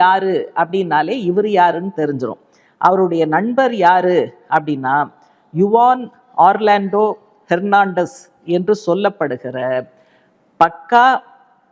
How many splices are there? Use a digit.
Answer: 0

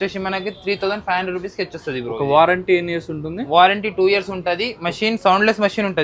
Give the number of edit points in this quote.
0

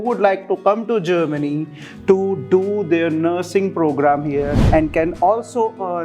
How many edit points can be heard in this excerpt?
1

